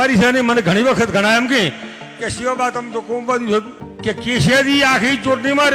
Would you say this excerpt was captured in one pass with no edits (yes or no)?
no